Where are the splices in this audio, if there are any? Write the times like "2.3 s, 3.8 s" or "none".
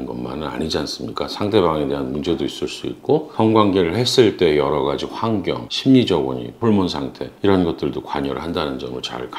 none